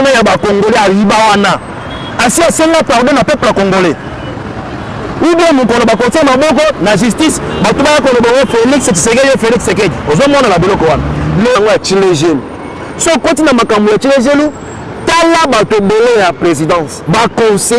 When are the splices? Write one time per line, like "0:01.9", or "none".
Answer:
0:11.6